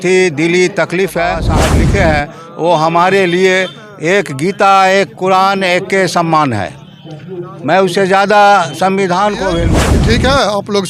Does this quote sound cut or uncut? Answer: cut